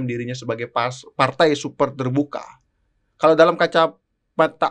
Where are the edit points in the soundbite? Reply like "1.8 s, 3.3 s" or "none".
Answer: none